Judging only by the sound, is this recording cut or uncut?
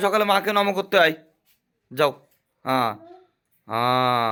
uncut